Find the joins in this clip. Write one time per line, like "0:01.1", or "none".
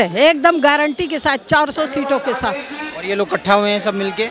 none